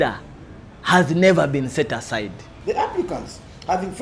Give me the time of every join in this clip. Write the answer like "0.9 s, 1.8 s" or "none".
2.5 s